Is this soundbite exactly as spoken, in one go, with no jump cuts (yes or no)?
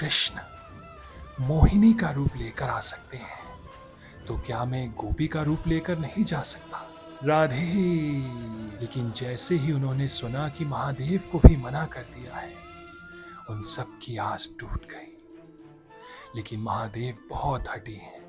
no